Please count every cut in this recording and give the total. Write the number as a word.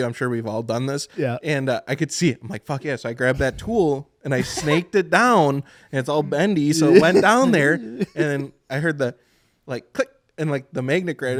zero